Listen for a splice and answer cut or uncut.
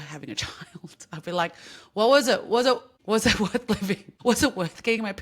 cut